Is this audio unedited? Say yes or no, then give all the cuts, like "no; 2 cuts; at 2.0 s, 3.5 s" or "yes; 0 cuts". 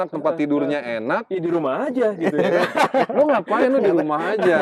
yes; 0 cuts